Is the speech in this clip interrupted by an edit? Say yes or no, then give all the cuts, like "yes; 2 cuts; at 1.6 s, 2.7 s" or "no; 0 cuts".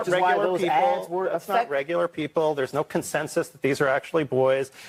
no; 0 cuts